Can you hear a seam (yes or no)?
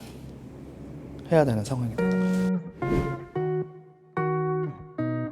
yes